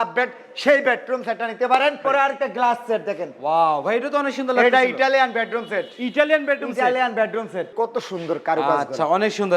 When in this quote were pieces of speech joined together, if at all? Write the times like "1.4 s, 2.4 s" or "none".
2.0 s, 7.7 s